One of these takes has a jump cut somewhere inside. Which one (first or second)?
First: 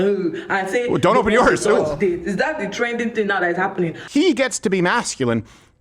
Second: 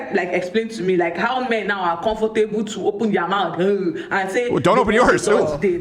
first